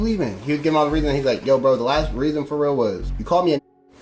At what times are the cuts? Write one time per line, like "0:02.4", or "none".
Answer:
0:03.1